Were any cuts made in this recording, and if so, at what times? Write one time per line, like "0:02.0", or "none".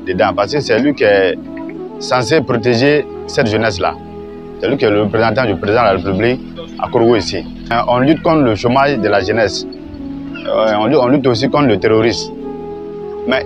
0:07.7